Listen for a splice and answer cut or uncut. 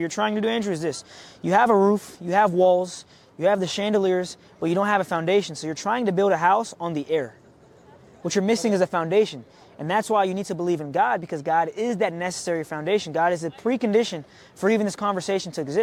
uncut